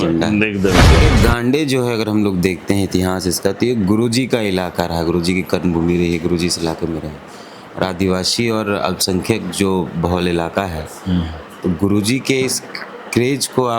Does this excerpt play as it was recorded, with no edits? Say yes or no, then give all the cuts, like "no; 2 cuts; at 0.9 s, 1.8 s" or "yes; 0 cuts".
no; 1 cut; at 1.0 s